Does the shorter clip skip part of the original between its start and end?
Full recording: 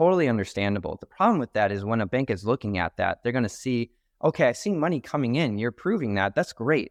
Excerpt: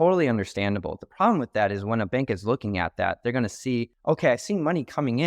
yes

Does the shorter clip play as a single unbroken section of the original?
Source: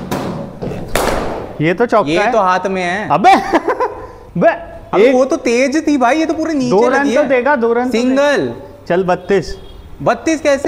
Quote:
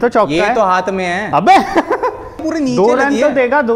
no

